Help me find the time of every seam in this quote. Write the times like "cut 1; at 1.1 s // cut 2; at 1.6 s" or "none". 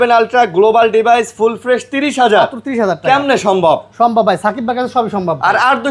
none